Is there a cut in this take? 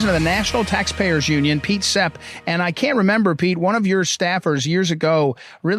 no; 0 cuts

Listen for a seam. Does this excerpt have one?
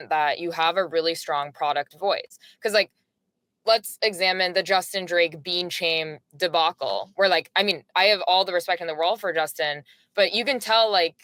no; 0 cuts

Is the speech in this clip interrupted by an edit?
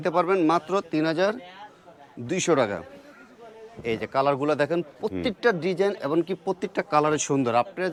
no; 0 cuts

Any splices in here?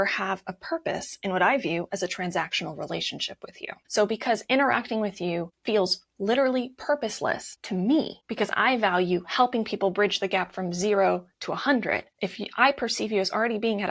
yes; 5 cuts; at 3.8 s, 5.5 s, 7.5 s, 8.2 s, 12.1 s

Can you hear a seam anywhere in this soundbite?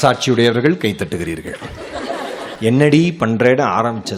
yes; 1 cut; at 2.5 s

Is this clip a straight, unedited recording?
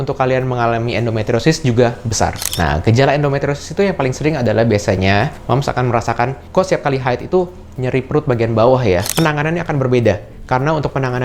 no; 2 cuts; at 2.4 s, 9.1 s

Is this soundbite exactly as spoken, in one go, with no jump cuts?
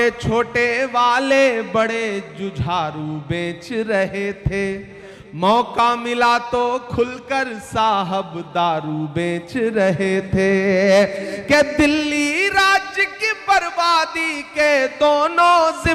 yes; 0 cuts

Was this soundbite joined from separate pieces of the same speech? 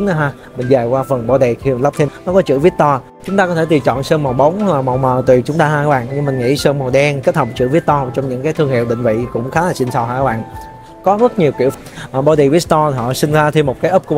yes; 2 cuts; at 2.1 s, 11.7 s

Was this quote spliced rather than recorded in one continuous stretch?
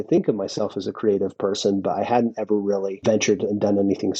yes; 1 cut; at 3.0 s

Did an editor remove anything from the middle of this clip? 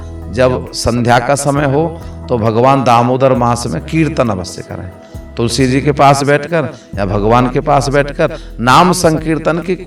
no; 0 cuts

